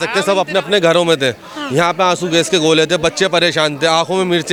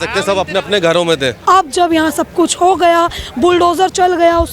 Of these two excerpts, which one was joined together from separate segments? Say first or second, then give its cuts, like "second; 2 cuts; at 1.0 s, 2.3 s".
second; 1 cut; at 1.3 s